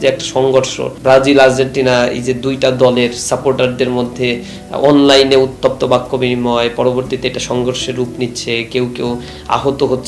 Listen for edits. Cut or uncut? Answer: cut